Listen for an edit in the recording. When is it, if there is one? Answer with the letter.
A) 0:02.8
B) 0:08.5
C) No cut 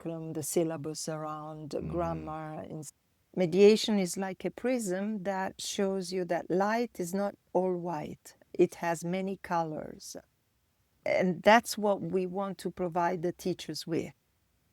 A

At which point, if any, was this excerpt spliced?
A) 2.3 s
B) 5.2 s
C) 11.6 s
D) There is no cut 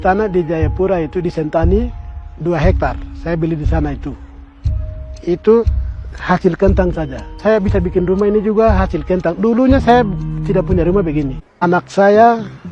C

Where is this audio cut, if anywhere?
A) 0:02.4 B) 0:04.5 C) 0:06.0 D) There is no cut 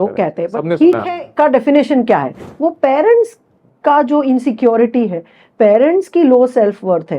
A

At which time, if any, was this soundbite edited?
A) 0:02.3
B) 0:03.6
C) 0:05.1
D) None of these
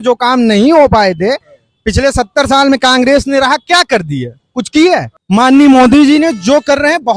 C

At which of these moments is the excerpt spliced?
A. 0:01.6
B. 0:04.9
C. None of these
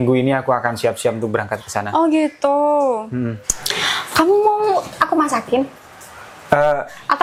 C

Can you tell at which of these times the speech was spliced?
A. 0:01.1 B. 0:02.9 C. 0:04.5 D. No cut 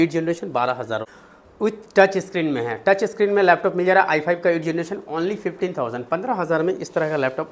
A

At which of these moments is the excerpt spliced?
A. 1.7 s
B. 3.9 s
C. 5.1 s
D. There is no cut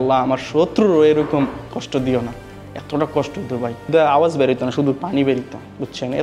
B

